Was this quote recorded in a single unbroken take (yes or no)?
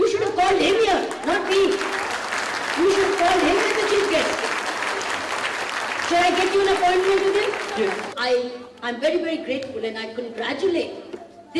no